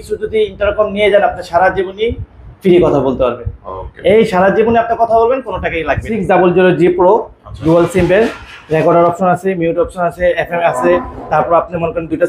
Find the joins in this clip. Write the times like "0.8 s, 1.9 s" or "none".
6.1 s